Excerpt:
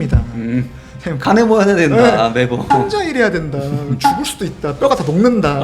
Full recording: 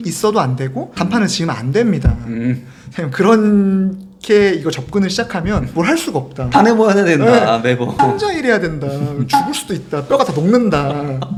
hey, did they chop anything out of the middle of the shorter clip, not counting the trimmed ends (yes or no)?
yes